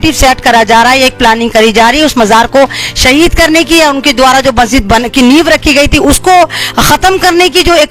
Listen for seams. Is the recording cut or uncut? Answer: uncut